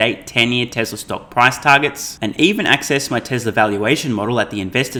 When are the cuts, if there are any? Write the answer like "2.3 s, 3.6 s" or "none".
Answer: none